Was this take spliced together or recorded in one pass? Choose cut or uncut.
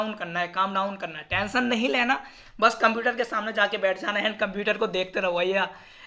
uncut